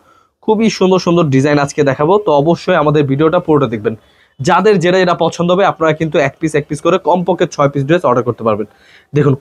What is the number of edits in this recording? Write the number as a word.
zero